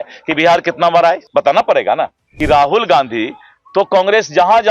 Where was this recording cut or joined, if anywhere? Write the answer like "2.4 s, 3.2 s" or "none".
1.2 s, 2.3 s